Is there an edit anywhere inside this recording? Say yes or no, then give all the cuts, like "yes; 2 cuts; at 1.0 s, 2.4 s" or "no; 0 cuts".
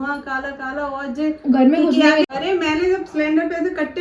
yes; 1 cut; at 2.3 s